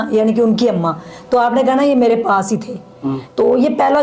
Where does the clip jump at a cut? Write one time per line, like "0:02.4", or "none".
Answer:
none